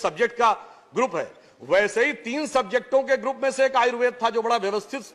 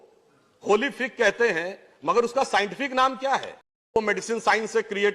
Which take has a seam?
second; 1 cut; at 4.0 s

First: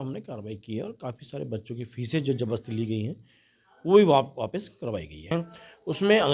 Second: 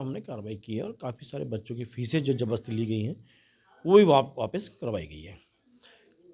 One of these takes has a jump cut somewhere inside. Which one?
first; 1 cut; at 5.3 s

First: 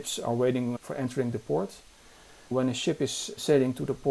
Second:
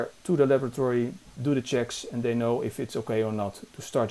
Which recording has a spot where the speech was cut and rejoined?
first; 1 cut; at 2.5 s

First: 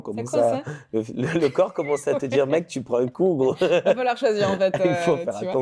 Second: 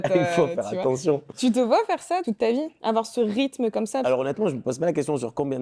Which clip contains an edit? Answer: second; 2 cuts; at 2.2 s, 4.0 s

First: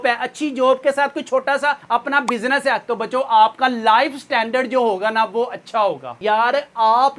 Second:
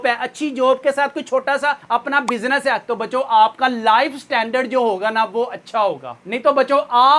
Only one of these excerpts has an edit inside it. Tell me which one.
first; 1 cut; at 6.1 s

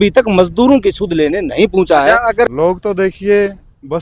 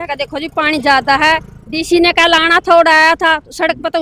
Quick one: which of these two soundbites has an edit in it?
first; 1 cut; at 2.5 s

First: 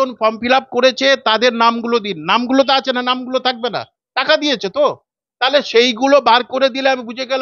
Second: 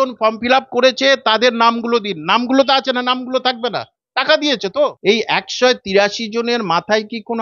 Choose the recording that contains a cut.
second; 1 cut; at 5.0 s

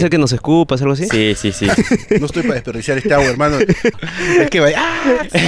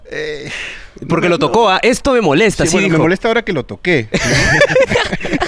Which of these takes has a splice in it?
first; 2 cuts; at 2.0 s, 4.1 s

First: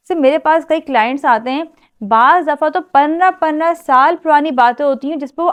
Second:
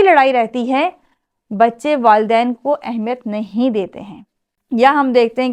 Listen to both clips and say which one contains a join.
second; 1 cut; at 4.5 s

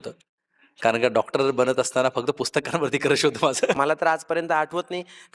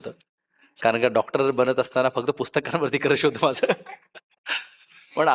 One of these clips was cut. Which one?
first; 1 cut; at 3.8 s

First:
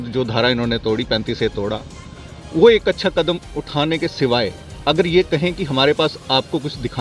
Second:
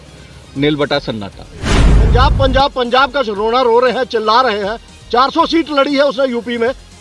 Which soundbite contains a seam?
second; 1 cut; at 1.9 s

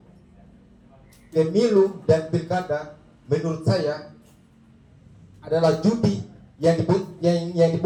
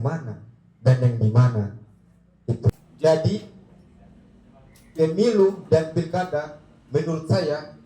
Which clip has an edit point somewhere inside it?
second; 1 cut; at 2.7 s

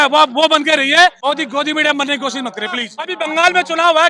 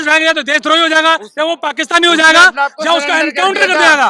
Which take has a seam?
first; 2 cuts; at 1.2 s, 3.0 s

